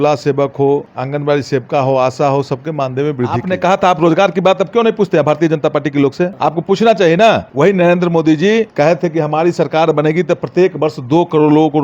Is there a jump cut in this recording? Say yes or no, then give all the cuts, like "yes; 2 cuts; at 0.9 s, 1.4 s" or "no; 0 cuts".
yes; 5 cuts; at 0.9 s, 3.4 s, 6.3 s, 7.5 s, 8.7 s